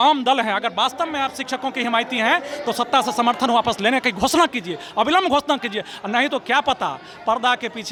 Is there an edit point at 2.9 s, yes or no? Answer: no